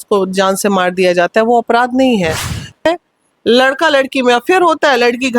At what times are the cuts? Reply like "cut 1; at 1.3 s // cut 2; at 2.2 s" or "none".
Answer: cut 1; at 2.9 s